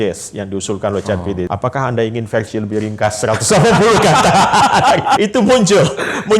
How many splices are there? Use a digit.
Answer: 2